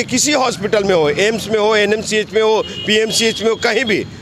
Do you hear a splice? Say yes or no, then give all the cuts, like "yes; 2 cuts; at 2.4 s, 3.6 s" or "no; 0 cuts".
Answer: no; 0 cuts